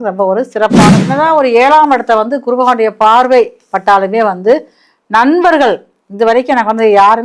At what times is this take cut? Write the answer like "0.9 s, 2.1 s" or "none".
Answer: 1.0 s